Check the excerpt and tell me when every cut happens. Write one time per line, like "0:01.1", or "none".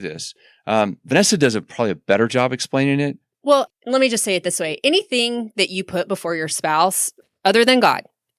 0:03.3
0:07.2